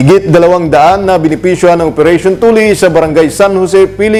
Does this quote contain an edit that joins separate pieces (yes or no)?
no